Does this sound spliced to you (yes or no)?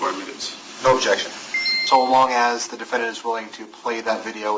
yes